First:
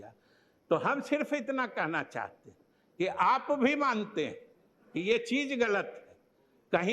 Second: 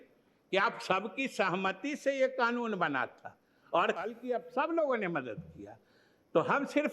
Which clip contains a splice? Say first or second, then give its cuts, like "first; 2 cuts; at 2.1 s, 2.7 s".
second; 1 cut; at 4.0 s